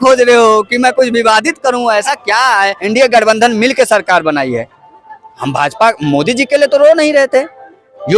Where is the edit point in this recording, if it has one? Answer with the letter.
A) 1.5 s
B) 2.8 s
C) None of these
B